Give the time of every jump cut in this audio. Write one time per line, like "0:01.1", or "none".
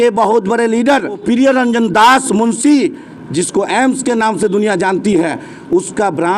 0:01.2
0:03.2